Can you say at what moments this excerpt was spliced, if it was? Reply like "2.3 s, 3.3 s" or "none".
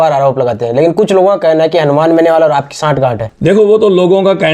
3.3 s

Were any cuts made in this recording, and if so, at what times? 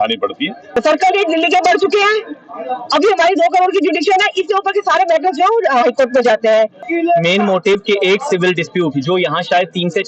0.8 s, 6.8 s

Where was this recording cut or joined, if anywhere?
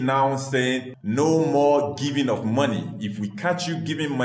0.9 s

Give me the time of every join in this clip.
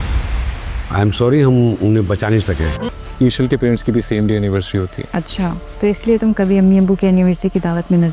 2.8 s

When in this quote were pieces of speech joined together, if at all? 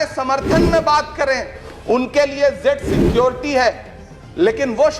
1.6 s

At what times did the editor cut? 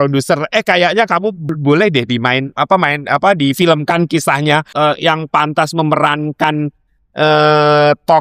1.6 s, 4.7 s

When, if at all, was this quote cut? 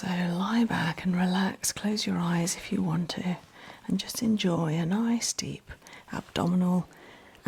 none

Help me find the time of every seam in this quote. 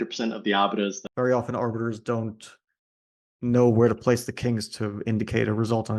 1.0 s

